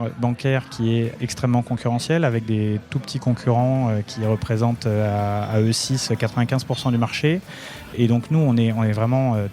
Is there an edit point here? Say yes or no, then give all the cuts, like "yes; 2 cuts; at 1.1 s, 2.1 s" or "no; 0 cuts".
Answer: yes; 2 cuts; at 1.1 s, 7.9 s